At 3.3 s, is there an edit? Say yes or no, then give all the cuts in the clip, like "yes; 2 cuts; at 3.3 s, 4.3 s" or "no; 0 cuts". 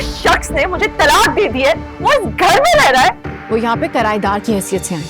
yes; 1 cut; at 3.3 s